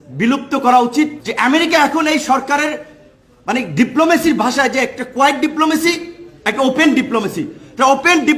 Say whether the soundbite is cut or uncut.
cut